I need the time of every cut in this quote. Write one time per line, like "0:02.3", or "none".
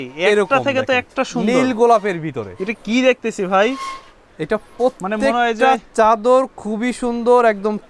none